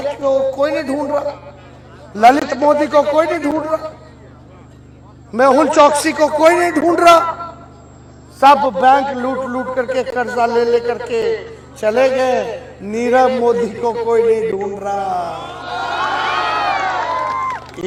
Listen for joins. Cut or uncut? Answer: uncut